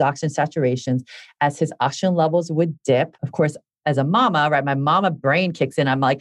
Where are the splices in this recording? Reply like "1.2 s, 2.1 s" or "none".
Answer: 3.2 s, 5.2 s